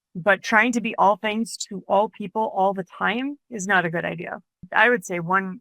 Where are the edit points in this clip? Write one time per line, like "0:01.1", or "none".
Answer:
0:04.6